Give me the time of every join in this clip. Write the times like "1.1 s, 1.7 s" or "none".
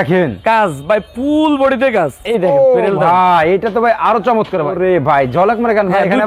2.2 s, 4.7 s